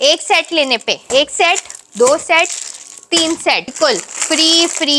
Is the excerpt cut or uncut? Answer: cut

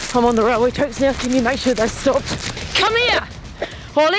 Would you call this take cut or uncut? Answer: cut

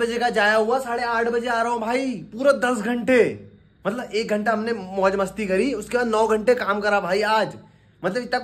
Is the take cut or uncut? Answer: uncut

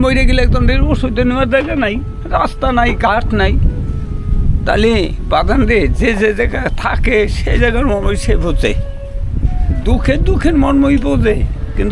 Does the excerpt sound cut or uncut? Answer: uncut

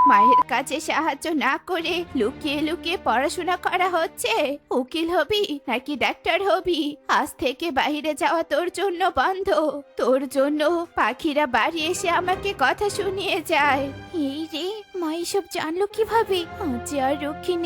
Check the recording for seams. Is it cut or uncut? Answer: uncut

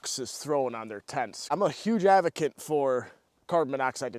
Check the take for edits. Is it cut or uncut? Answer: cut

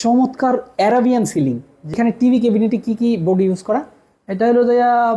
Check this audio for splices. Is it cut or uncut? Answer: cut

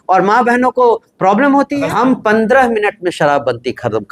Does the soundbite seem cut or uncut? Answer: cut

